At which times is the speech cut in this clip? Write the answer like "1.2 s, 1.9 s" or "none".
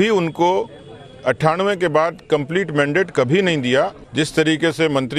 4.0 s